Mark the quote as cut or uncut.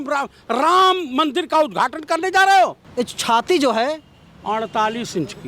cut